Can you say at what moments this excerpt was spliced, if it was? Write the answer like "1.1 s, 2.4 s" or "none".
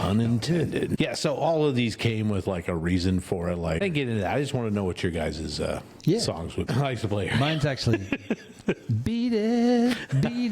1.0 s, 3.8 s, 6.7 s

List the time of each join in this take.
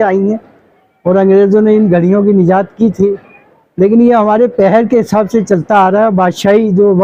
none

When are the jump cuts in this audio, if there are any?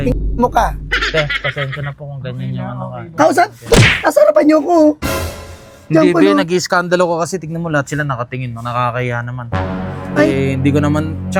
none

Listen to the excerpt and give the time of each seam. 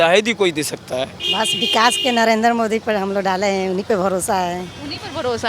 1.2 s

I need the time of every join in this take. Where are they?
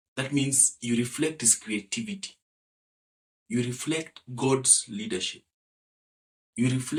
none

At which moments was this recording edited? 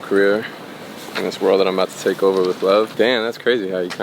2.9 s

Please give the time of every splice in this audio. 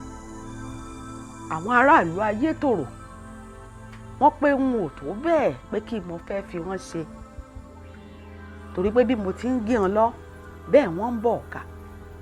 none

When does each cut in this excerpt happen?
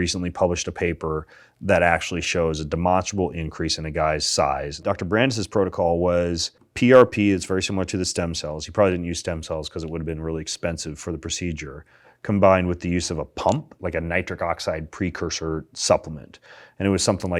4.8 s, 6.6 s, 13.8 s

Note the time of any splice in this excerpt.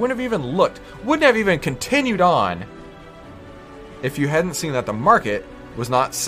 none

